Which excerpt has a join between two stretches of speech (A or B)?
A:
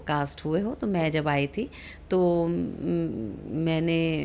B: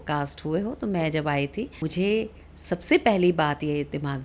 B